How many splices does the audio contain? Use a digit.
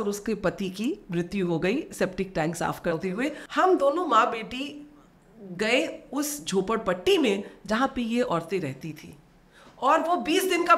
1